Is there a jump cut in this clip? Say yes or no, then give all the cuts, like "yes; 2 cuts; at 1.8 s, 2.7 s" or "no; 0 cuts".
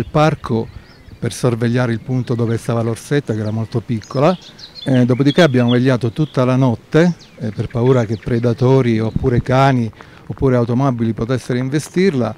no; 0 cuts